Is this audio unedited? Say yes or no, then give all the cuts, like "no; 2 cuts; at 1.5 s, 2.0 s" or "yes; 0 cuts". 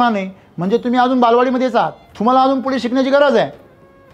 no; 1 cut; at 2.0 s